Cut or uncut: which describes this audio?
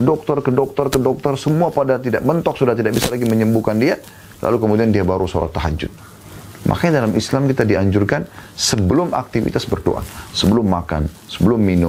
uncut